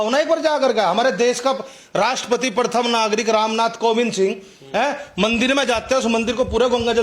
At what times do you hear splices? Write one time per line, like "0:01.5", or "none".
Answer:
none